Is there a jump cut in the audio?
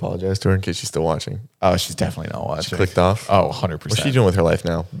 no; 0 cuts

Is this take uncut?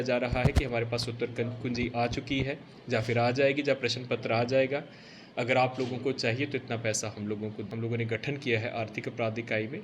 no; 1 cut; at 7.6 s

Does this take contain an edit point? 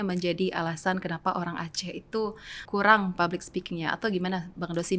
yes; 1 cut; at 2.6 s

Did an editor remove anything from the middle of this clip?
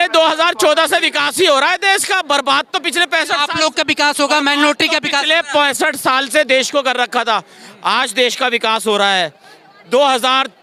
no; 0 cuts

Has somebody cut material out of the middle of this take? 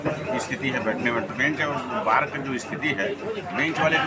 yes; 1 cut; at 1.3 s

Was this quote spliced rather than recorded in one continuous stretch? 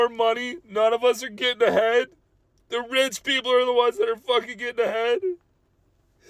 no; 0 cuts

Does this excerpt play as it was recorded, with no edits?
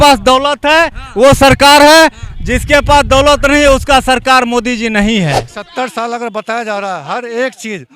no; 1 cut; at 5.5 s

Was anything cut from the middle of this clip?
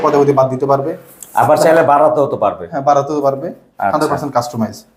no; 0 cuts

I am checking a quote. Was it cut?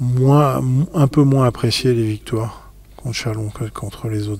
no; 0 cuts

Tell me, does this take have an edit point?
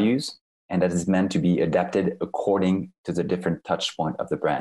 no; 0 cuts

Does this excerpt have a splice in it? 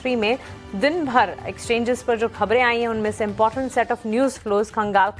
no; 0 cuts

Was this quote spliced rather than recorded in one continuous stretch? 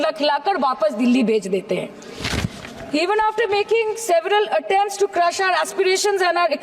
no; 0 cuts

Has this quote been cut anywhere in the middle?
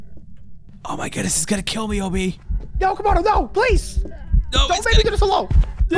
no; 0 cuts

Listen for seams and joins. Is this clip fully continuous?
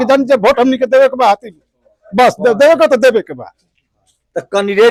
yes; 0 cuts

